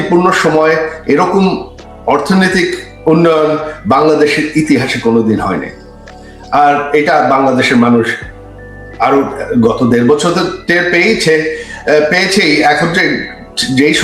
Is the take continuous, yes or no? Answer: yes